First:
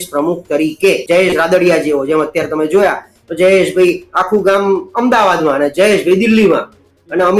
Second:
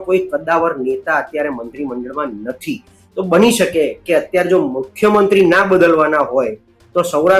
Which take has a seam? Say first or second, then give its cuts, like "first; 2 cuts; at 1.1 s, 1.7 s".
first; 1 cut; at 1.0 s